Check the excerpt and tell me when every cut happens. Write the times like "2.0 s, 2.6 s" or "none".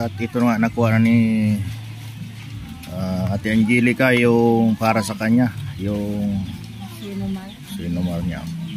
none

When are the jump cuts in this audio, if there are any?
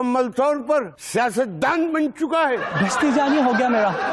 none

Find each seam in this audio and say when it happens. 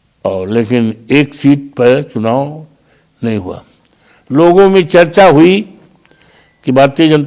none

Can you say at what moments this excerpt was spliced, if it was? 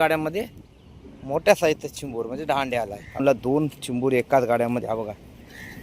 3.2 s

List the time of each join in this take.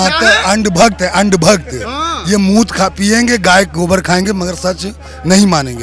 none

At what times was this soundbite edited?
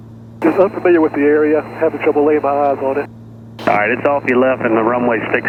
none

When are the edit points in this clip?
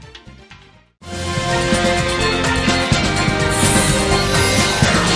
none

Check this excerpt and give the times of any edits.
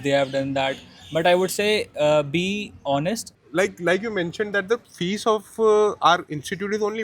3.3 s

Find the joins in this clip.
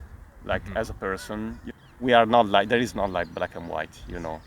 1.6 s

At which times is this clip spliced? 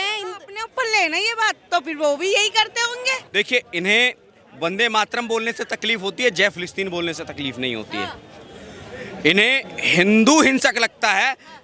3.2 s

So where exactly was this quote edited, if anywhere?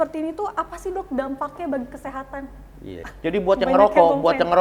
3.0 s

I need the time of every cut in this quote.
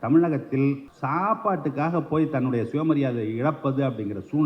0.9 s

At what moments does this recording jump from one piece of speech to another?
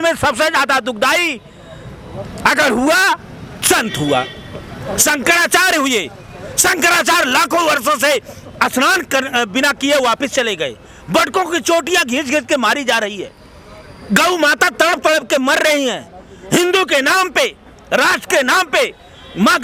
none

